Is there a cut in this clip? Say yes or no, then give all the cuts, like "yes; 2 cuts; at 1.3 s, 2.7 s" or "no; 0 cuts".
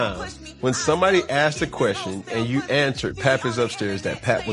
no; 0 cuts